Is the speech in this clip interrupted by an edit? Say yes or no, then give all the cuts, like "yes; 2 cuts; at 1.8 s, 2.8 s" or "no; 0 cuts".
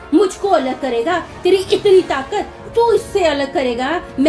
no; 0 cuts